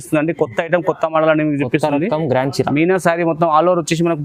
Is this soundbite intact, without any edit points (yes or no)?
yes